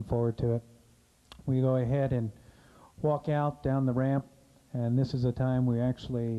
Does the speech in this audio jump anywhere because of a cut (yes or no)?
yes